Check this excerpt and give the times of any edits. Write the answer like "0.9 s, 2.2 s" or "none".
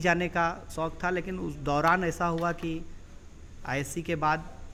none